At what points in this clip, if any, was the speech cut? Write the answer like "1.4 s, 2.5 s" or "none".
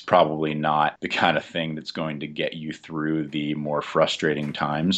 1.0 s